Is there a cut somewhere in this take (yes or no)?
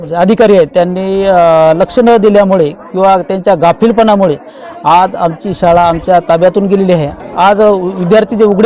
yes